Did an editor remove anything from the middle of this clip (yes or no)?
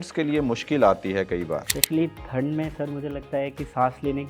yes